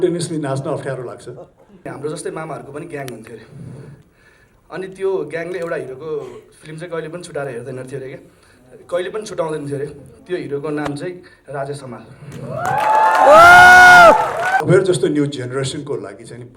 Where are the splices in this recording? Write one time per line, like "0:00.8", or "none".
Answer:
0:01.9
0:14.6